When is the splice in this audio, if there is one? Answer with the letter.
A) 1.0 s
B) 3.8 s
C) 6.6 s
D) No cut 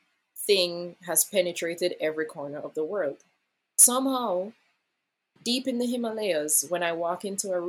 B